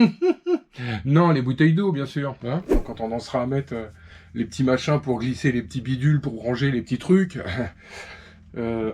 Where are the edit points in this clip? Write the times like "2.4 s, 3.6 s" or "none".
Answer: 2.9 s